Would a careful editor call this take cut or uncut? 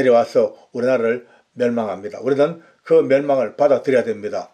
uncut